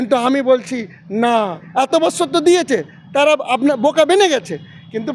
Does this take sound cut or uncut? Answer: uncut